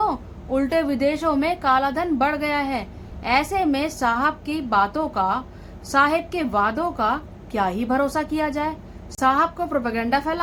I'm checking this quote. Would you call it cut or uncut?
uncut